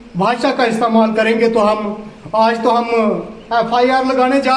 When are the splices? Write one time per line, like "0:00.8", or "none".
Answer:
none